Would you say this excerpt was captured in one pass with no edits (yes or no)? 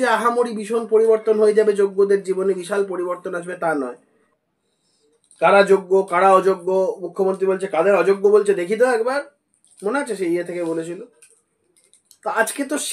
yes